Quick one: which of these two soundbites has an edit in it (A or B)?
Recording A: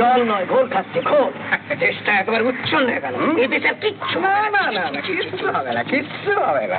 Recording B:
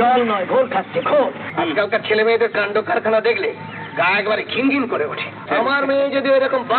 B